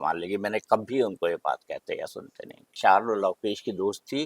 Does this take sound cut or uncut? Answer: cut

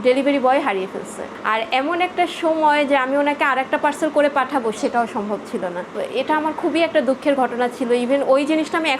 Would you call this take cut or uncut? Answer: uncut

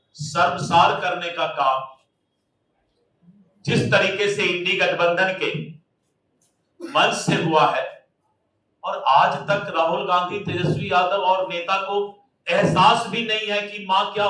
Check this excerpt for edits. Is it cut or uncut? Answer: uncut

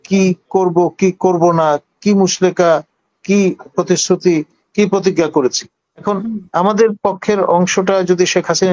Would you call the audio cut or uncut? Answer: cut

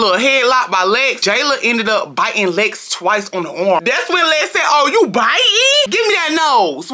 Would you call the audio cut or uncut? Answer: cut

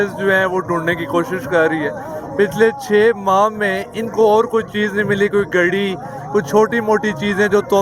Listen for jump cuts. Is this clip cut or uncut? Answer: uncut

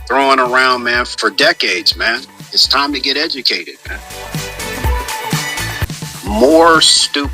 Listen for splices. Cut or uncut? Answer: cut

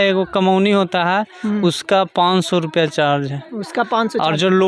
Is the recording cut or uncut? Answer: uncut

